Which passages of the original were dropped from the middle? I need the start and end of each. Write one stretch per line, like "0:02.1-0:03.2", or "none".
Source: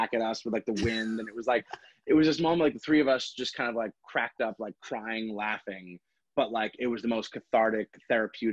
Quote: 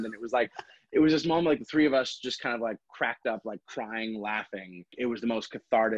0:06.1-0:06.7